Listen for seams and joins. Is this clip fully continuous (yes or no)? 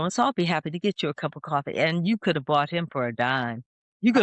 yes